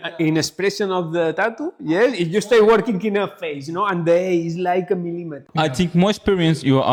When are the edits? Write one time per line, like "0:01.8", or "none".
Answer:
none